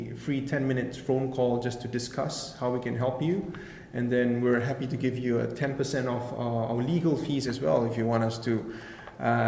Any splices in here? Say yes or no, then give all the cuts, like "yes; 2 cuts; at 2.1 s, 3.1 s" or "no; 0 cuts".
no; 0 cuts